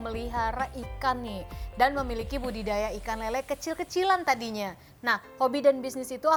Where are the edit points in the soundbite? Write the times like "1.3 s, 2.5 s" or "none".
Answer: none